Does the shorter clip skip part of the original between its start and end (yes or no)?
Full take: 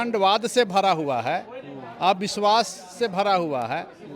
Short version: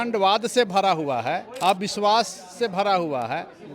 yes